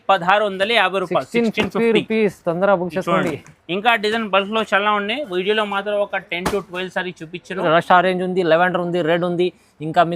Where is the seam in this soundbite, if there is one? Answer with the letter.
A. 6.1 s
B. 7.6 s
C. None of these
B